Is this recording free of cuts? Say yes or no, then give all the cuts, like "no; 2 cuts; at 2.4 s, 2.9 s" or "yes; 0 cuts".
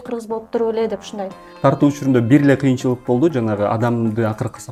no; 1 cut; at 1.5 s